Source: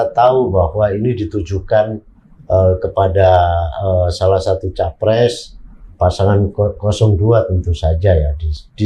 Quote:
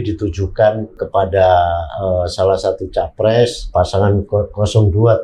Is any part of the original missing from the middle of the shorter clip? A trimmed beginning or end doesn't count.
yes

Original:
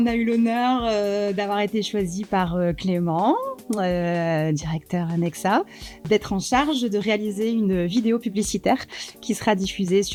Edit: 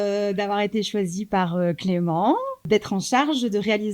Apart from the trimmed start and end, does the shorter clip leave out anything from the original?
yes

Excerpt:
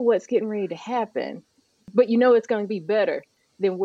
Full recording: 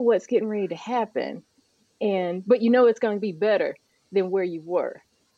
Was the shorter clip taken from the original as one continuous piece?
no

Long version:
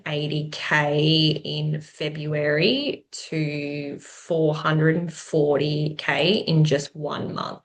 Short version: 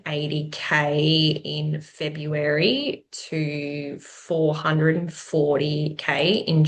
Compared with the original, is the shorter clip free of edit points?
yes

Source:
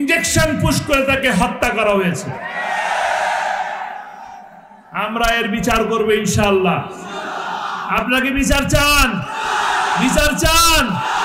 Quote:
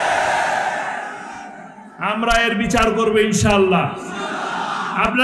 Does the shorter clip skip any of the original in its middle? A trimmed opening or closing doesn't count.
no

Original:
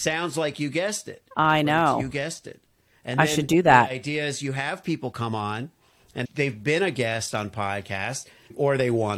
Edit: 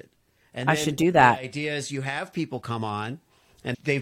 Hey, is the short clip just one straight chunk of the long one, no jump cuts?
yes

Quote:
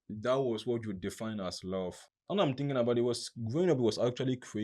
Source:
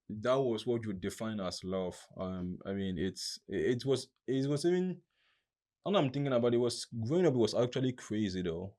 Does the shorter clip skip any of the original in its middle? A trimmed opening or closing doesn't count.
yes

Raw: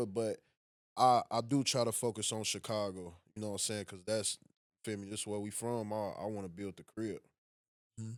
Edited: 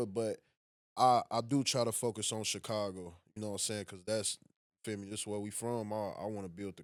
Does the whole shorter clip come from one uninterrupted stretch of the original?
yes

